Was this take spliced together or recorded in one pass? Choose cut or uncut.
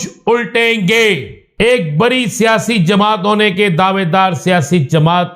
cut